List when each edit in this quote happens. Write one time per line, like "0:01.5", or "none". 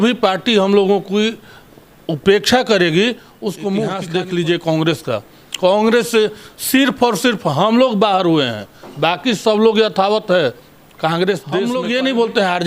0:04.1
0:11.7